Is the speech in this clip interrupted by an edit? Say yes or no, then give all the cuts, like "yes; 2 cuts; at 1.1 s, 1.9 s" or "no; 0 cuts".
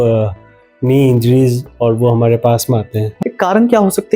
yes; 1 cut; at 3.0 s